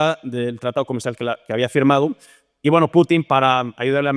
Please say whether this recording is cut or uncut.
uncut